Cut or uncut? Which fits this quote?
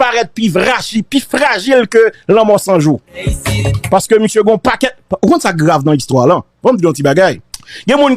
uncut